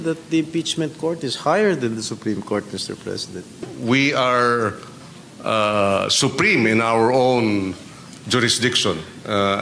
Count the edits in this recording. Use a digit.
1